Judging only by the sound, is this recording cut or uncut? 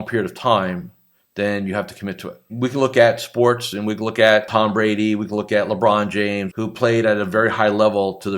cut